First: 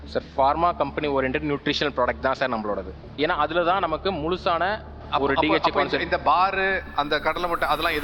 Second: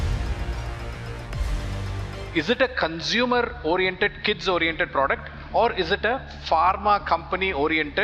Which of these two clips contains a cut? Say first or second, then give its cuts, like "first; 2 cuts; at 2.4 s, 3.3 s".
second; 1 cut; at 2.2 s